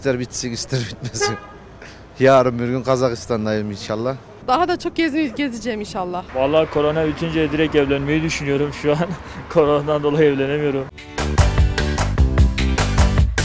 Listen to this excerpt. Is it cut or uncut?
cut